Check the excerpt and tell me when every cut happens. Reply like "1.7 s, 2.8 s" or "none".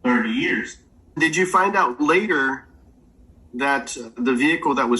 1.2 s